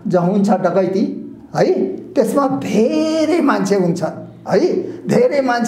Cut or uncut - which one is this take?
uncut